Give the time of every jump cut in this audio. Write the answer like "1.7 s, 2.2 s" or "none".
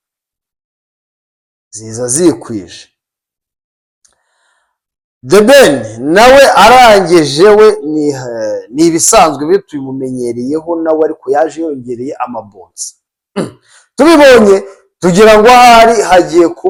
none